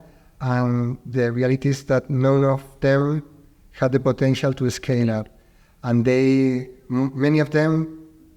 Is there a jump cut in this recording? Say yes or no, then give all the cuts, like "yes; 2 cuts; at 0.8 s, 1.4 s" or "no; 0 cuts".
no; 0 cuts